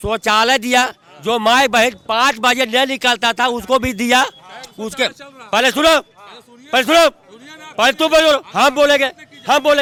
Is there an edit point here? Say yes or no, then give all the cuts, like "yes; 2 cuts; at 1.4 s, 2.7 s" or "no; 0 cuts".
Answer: no; 0 cuts